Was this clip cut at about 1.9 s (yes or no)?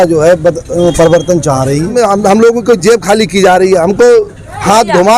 yes